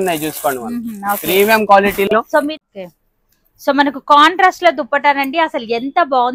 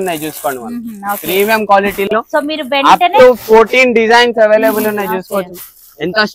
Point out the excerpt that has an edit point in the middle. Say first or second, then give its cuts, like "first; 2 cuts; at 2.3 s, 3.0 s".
first; 1 cut; at 2.6 s